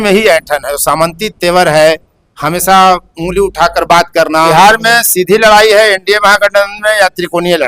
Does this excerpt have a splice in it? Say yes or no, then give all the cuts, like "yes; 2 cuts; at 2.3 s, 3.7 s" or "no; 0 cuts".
yes; 1 cut; at 4.5 s